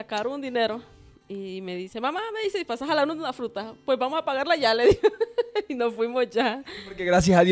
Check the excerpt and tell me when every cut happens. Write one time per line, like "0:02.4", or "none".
none